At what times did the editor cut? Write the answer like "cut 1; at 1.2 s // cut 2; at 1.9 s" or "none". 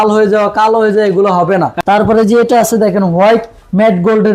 cut 1; at 1.7 s